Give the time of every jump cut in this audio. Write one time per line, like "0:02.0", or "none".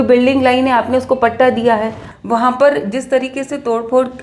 0:02.0